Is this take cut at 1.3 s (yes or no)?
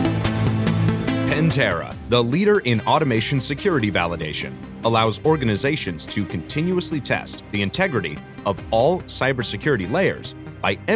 yes